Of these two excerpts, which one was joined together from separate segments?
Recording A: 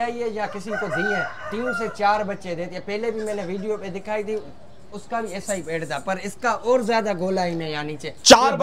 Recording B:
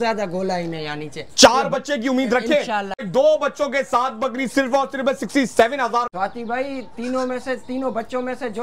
B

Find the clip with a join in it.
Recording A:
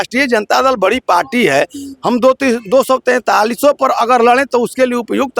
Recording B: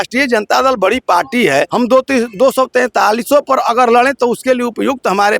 B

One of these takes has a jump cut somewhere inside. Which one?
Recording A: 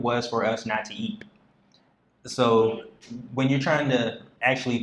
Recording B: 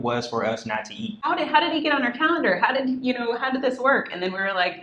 B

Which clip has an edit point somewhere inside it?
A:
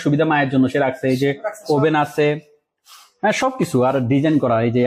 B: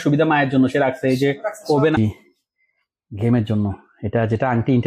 B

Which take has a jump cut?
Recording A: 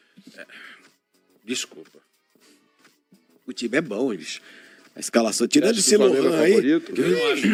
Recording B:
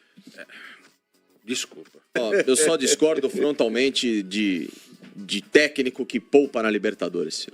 B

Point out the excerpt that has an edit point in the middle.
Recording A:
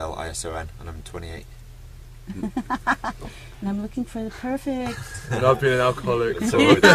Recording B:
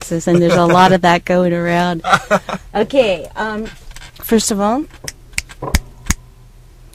B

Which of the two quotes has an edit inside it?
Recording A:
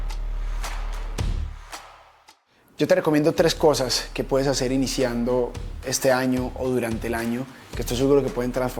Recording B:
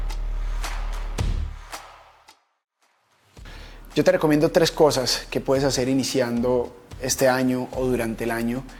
A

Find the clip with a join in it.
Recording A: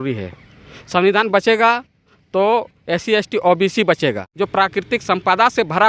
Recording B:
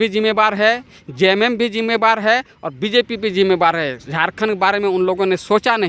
A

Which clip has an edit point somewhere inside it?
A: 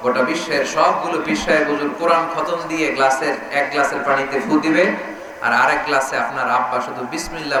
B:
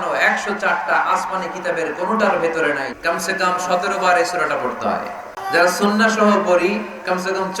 B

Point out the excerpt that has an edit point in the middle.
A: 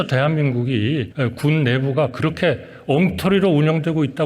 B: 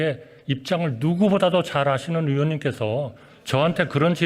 A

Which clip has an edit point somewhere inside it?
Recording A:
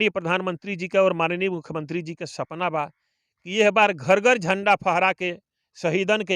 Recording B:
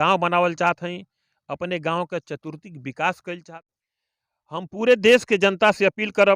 B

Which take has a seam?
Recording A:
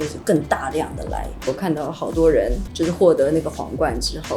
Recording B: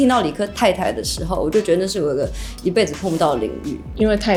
A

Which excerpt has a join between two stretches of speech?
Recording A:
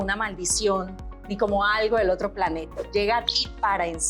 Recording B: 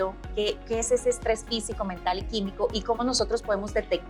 A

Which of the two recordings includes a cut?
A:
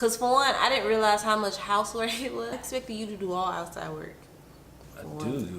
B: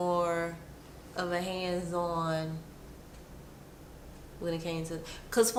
A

